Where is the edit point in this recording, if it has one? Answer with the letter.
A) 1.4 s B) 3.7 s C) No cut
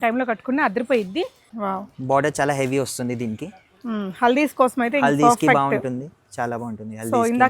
A